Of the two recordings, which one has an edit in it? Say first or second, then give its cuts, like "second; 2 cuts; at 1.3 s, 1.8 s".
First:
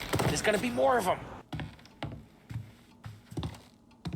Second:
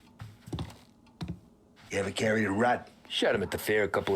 first; 1 cut; at 1.3 s